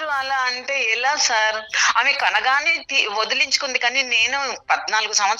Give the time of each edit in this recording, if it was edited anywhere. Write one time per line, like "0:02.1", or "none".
0:01.8